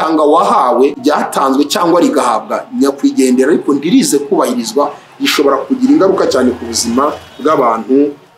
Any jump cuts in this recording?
yes; 1 cut; at 1.0 s

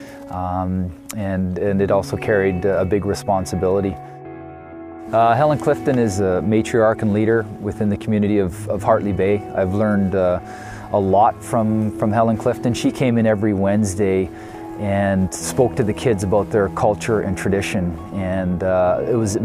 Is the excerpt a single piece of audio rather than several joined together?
yes; 0 cuts

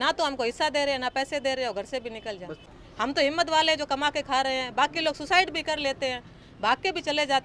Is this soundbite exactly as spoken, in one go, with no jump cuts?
no; 1 cut; at 2.5 s

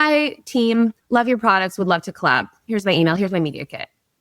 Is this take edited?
yes; 1 cut; at 1.0 s

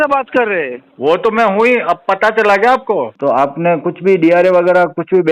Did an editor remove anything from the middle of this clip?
yes; 1 cut; at 3.1 s

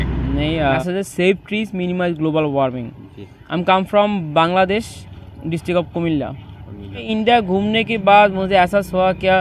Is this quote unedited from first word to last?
no; 2 cuts; at 0.8 s, 7.1 s

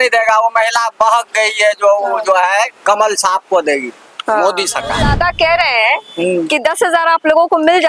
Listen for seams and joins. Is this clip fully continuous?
no; 1 cut; at 5.0 s

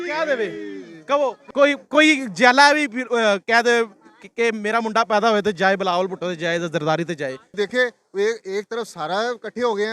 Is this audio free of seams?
no; 2 cuts; at 1.5 s, 7.3 s

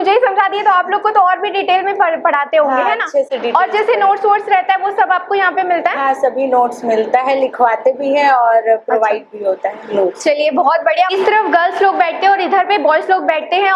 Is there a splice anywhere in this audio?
no; 0 cuts

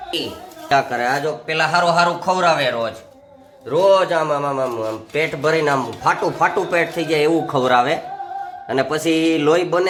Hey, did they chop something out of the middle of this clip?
no; 0 cuts

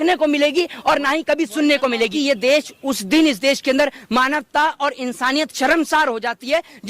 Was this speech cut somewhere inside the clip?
yes; 1 cut; at 2.1 s

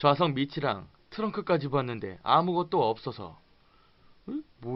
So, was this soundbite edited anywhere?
no; 0 cuts

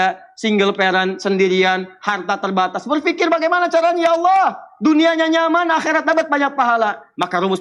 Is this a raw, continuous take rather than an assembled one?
yes; 0 cuts

